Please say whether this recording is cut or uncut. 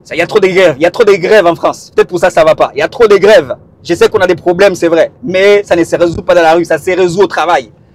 uncut